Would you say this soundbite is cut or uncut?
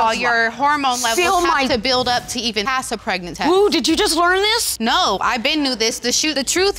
uncut